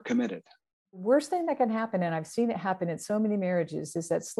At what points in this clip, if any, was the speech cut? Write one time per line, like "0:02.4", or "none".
0:01.0